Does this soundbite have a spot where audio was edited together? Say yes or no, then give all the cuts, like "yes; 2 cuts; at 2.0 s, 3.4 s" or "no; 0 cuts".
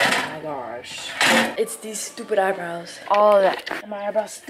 yes; 2 cuts; at 1.5 s, 2.9 s